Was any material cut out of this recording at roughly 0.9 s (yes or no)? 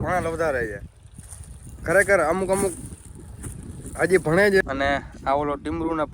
no